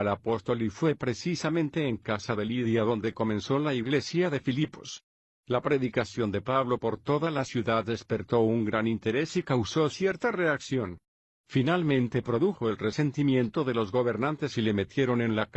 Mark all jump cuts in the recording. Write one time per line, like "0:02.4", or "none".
0:02.0